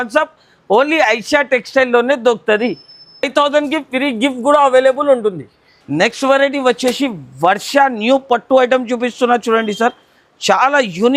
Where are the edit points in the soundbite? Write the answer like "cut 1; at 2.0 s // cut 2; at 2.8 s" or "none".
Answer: none